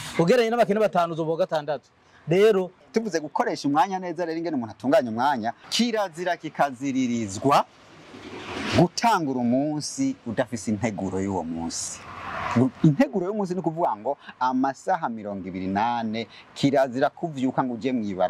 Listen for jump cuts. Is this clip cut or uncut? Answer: cut